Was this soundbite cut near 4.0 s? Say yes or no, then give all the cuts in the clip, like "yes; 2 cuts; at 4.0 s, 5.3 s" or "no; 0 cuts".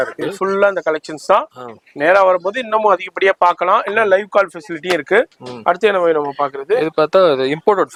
no; 0 cuts